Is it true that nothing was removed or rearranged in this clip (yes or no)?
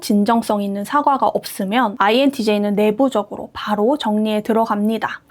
yes